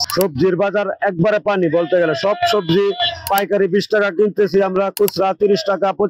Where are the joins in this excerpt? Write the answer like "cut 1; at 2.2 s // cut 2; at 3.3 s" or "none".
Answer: none

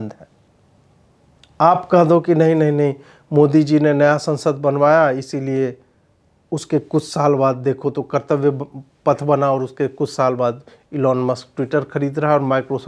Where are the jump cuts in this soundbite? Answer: none

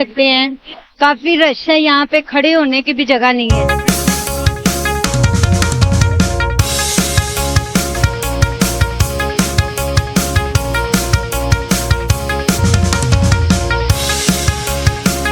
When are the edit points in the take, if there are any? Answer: cut 1; at 7.9 s // cut 2; at 12.6 s

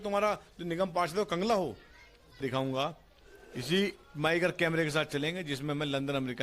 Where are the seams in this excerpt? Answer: cut 1; at 2.4 s

